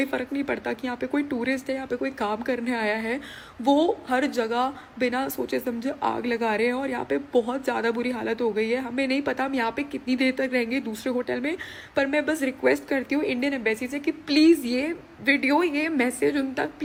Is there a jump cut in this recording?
no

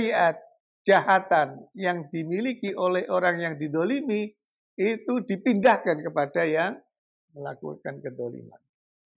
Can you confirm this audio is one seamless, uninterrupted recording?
yes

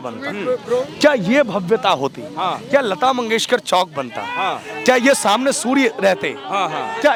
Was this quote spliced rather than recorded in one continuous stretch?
no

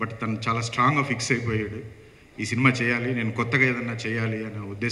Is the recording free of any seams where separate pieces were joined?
yes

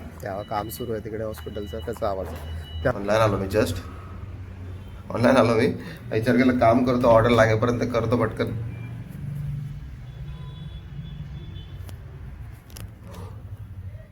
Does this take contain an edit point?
yes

